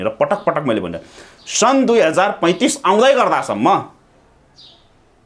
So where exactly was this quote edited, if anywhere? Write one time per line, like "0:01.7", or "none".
none